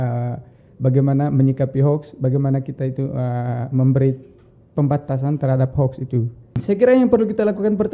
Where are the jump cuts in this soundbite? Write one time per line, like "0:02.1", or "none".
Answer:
0:06.6

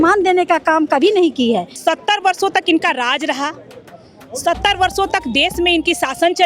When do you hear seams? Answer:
0:01.7

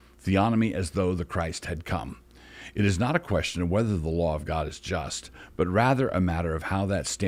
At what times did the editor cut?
none

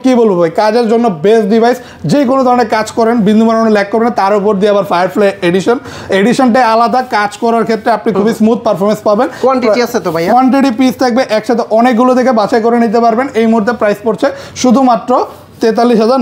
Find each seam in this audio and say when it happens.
none

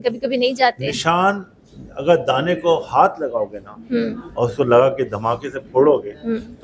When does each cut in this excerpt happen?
none

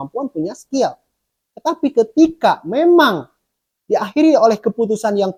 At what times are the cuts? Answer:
none

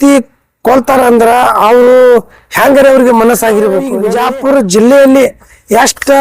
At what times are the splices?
0:04.0

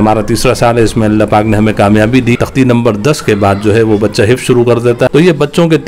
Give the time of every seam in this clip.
0:02.4
0:04.9

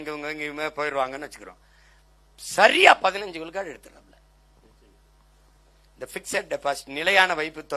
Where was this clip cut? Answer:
none

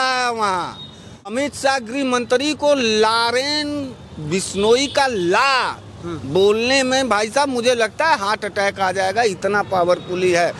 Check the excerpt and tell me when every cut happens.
0:01.3

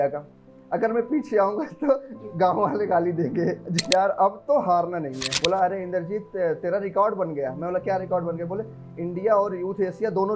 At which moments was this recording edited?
0:03.8
0:05.2

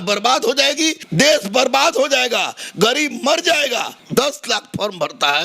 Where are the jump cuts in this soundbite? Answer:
0:01.0
0:04.0

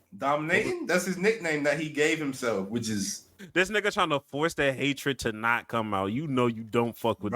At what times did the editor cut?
0:03.4

